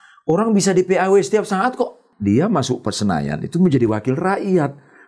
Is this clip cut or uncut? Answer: cut